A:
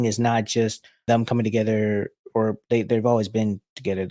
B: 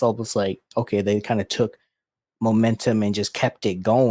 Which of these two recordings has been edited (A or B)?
A